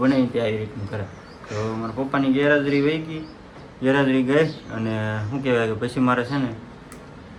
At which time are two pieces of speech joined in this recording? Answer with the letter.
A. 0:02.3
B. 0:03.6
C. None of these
C